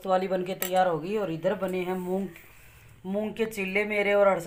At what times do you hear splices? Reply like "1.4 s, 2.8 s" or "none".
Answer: none